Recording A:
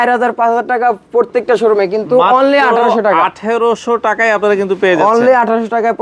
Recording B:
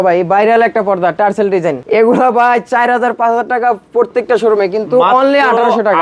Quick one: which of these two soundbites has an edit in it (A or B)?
B